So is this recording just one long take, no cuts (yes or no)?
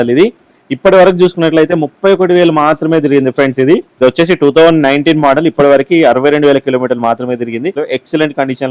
no